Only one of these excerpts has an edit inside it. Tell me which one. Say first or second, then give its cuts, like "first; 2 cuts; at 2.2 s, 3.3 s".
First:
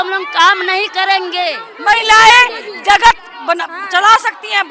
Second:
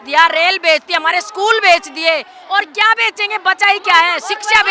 first; 1 cut; at 1.7 s